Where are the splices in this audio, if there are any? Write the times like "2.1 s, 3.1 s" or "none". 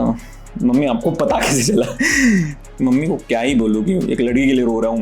2.6 s